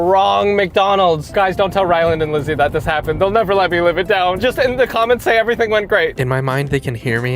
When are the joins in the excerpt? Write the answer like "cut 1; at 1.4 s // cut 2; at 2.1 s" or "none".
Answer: cut 1; at 1.3 s // cut 2; at 4.4 s // cut 3; at 6.2 s